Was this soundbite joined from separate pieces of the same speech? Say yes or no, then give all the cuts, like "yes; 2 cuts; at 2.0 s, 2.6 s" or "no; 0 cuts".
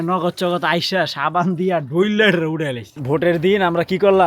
yes; 1 cut; at 3.0 s